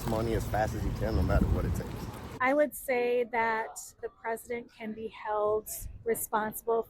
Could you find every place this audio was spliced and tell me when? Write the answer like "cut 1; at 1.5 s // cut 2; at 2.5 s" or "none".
cut 1; at 2.4 s // cut 2; at 4.0 s